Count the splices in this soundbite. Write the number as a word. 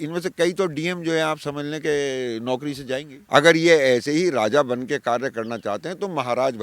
one